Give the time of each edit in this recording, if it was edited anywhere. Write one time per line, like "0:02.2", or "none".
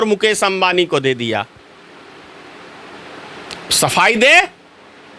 none